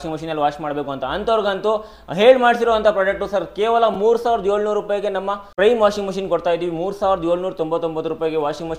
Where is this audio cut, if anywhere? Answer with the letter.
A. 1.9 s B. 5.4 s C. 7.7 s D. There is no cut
B